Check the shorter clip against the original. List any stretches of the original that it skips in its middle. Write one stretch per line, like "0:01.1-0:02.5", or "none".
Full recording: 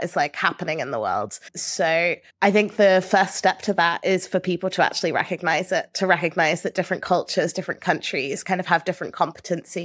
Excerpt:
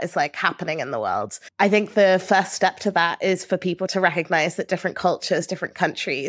0:01.4-0:02.3
0:04.7-0:06.0